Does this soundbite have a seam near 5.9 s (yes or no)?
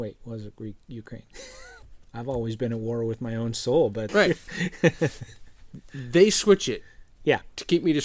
no